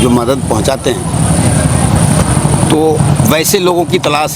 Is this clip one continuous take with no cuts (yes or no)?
yes